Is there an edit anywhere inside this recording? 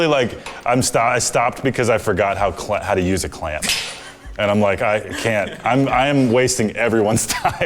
no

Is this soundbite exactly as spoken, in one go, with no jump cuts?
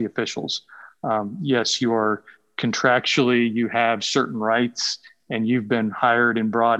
yes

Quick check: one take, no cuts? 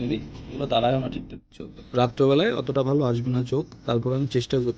no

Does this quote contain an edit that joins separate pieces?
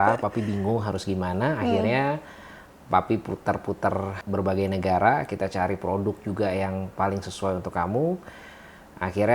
yes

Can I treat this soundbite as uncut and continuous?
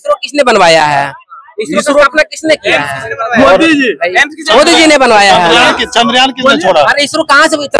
yes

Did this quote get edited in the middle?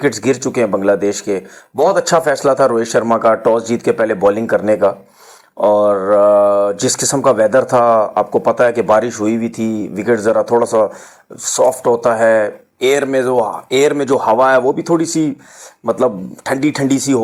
no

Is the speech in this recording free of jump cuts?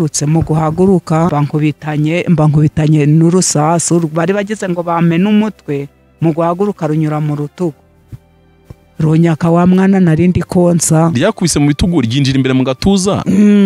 no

